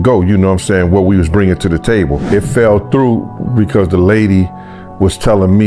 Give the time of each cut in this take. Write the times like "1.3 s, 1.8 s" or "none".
2.3 s